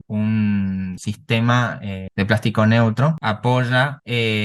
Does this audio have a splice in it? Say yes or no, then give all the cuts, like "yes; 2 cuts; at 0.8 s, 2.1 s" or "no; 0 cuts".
yes; 1 cut; at 3.2 s